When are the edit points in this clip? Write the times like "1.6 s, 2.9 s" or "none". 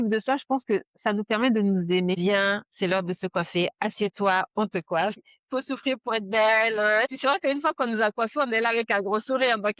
2.2 s